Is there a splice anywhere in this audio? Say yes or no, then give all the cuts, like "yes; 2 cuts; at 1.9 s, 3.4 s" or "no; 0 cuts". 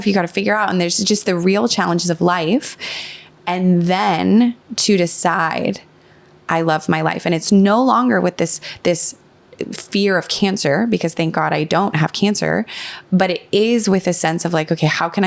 no; 0 cuts